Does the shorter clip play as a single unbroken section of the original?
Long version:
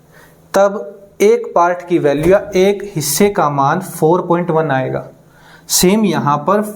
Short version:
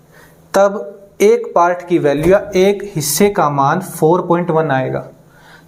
yes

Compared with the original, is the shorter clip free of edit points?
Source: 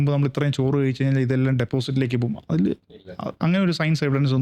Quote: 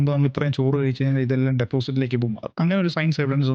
no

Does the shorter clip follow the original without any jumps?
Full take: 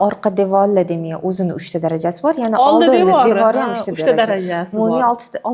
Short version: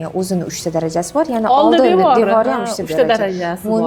yes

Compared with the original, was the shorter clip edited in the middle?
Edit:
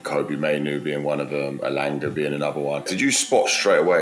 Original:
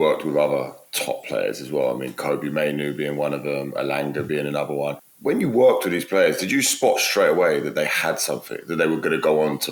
yes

